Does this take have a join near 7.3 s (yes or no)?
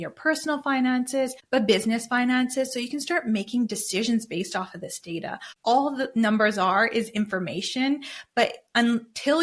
no